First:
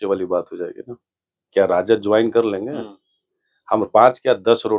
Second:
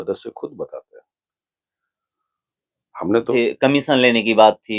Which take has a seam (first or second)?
second